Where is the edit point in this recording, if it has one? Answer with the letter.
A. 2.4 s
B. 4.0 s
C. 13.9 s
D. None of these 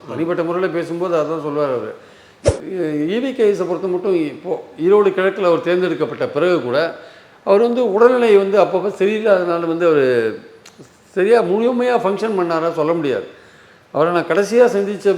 A